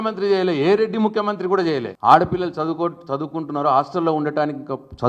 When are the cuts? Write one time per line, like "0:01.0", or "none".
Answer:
0:01.9

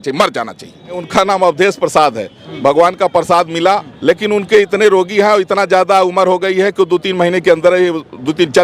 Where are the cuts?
0:01.0
0:03.9

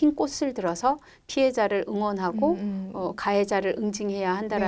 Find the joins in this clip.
none

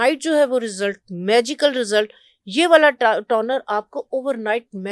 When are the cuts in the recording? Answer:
none

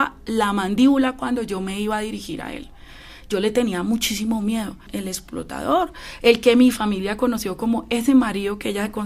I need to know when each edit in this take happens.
0:04.9

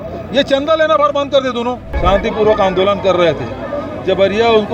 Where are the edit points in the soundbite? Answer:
0:01.9

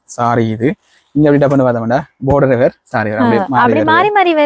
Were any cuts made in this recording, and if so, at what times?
none

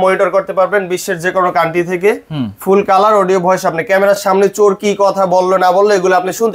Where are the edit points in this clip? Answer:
none

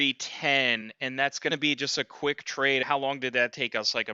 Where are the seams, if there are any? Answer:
0:01.3
0:02.8

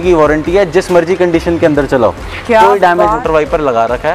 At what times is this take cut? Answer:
0:03.2

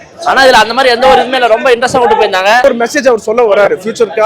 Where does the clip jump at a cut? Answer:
0:02.6

